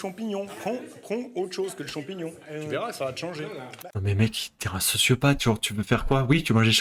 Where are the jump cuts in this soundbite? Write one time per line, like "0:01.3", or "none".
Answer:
none